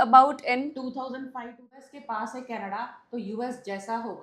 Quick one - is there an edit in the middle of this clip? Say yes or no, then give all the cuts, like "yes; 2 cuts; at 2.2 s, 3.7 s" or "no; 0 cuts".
yes; 1 cut; at 1.8 s